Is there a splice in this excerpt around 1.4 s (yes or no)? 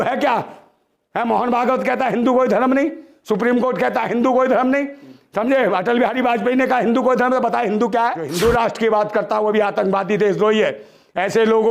no